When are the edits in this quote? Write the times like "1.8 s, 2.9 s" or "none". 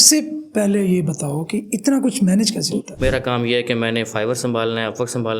2.9 s